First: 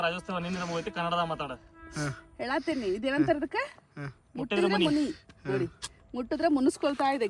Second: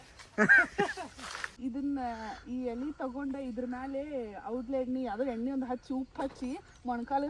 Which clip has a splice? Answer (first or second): second